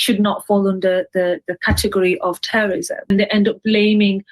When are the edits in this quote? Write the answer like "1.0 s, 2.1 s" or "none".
3.1 s